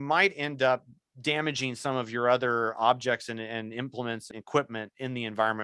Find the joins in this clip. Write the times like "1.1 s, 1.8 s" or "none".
4.3 s